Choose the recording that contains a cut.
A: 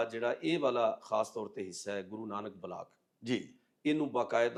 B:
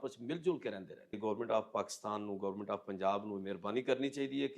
B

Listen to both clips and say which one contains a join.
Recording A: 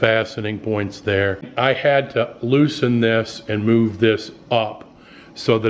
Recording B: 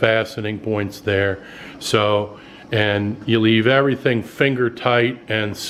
A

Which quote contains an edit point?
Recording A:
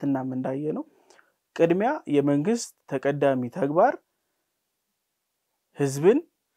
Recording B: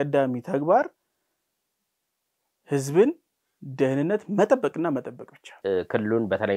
B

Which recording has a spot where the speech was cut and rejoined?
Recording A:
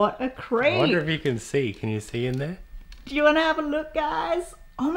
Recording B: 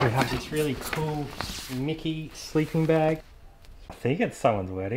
B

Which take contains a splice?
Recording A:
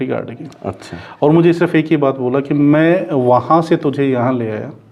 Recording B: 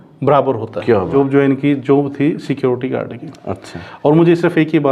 B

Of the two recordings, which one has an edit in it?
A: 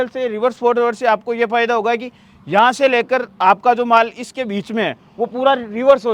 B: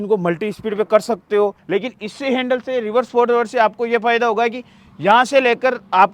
B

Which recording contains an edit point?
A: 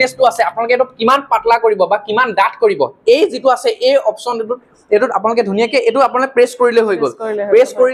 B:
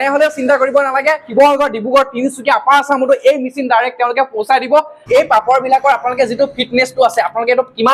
B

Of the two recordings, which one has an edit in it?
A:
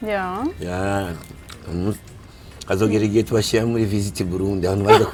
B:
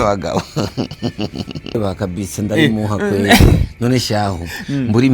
B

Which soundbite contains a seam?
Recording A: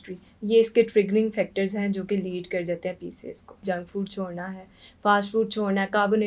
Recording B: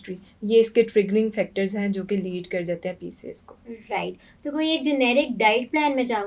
A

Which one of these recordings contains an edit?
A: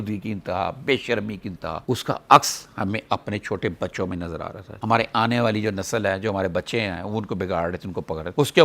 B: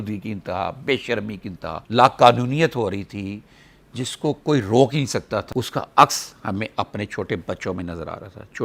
A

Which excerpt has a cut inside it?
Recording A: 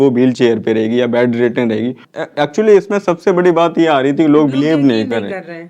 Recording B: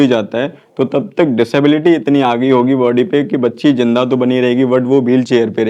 A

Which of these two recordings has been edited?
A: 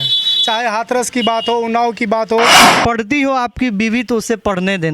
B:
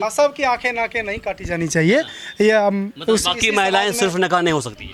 A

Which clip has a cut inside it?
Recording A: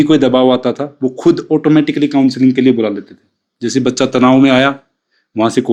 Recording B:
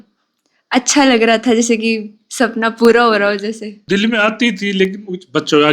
B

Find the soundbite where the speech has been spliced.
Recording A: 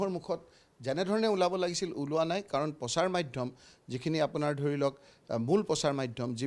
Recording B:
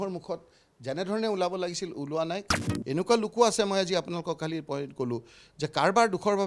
B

